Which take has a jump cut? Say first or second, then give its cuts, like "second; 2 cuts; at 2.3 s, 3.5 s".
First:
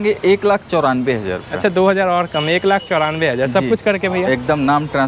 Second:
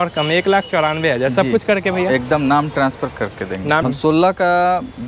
second; 1 cut; at 3.8 s